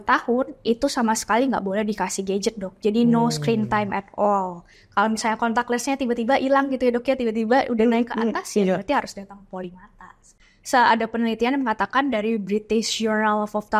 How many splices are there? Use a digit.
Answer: 2